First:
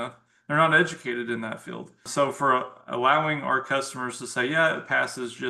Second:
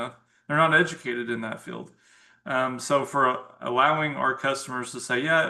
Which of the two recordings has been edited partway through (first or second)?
first